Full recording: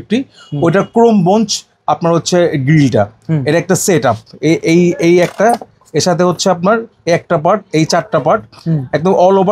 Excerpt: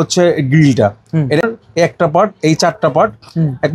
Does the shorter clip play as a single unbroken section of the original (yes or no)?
no